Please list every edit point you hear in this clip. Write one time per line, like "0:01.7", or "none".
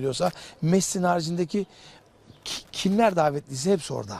0:03.0